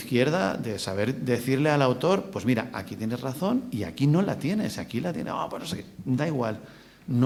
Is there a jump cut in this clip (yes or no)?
no